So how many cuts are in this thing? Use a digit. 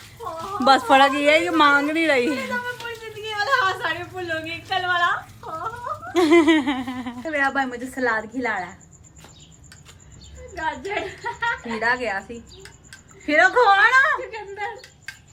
0